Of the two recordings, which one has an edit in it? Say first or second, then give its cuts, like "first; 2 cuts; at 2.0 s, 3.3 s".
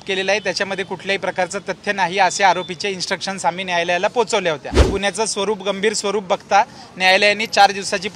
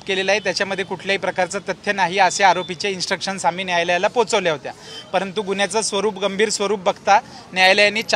first; 1 cut; at 4.9 s